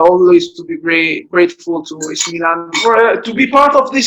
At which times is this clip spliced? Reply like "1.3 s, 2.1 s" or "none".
2.7 s